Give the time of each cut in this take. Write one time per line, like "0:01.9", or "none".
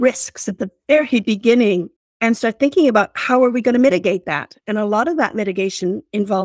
none